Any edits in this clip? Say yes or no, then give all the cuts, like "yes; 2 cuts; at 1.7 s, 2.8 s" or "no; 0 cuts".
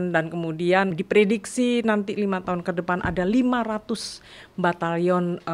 yes; 1 cut; at 1.0 s